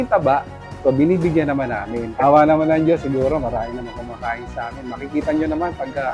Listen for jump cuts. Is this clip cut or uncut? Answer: cut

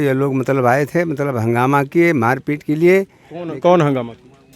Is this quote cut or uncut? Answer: uncut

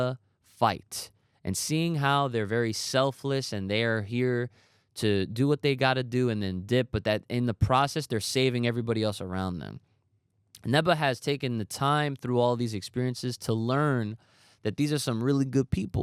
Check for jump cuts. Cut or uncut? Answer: uncut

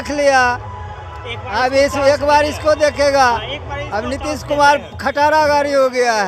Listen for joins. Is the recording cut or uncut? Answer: uncut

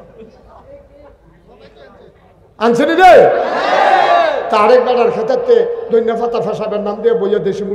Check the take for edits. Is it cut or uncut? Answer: uncut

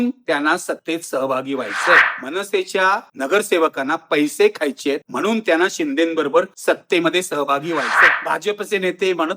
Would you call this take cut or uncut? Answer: cut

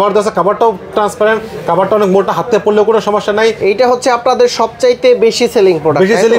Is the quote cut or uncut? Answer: cut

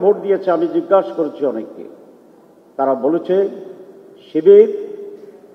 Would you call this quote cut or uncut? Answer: uncut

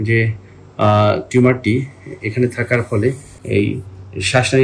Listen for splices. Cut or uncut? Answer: cut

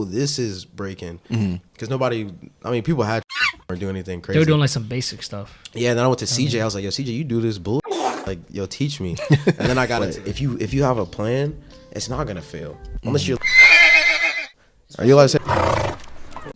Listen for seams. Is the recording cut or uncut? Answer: cut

